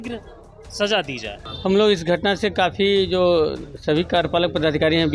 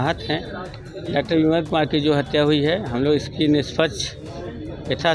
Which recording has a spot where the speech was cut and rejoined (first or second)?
first